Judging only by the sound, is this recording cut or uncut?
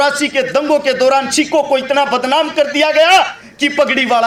uncut